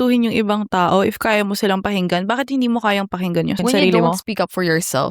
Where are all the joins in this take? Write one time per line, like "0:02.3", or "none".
0:03.6

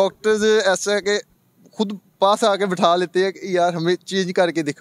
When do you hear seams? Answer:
none

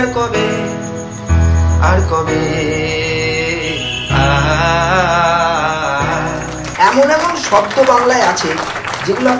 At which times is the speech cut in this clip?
0:06.6

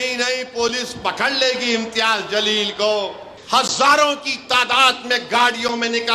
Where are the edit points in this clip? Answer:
0:03.3

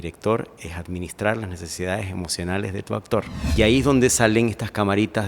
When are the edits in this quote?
0:03.4

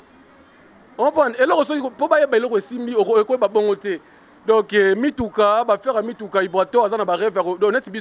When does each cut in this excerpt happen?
none

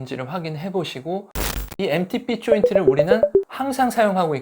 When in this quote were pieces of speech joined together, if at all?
0:01.4

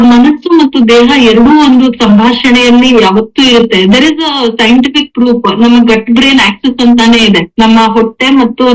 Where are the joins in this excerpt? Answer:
none

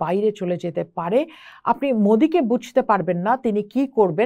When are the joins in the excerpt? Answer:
none

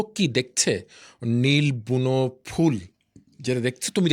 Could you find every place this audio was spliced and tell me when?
none

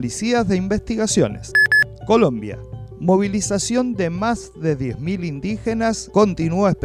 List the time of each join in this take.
0:01.5

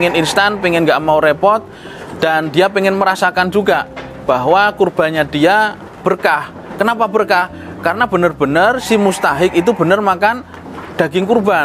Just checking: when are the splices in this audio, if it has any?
none

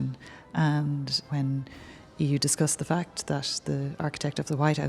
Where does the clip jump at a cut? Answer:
0:01.6

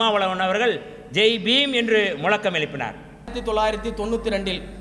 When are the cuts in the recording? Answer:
0:03.4

